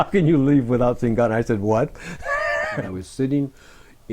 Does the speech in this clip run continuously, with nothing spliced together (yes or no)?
no